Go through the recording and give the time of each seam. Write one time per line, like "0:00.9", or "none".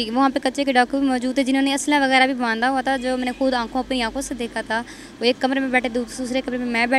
none